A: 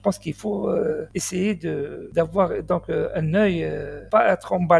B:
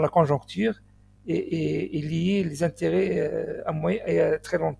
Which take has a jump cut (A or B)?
A